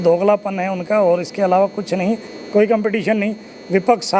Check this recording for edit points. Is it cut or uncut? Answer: cut